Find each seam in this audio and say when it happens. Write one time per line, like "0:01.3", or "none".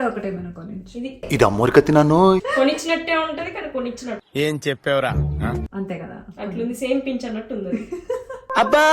0:02.5
0:05.7